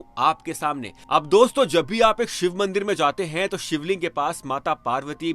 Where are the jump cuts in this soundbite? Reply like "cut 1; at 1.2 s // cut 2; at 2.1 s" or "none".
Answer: none